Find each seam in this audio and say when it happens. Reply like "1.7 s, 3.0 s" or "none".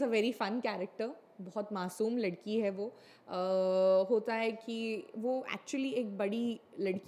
none